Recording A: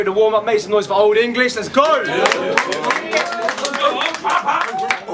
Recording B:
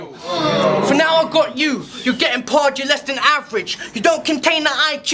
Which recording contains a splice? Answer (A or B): A